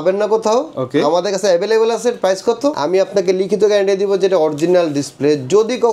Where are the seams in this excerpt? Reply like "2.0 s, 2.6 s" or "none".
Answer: 2.8 s